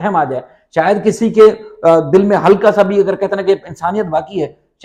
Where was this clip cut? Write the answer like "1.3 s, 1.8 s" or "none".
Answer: none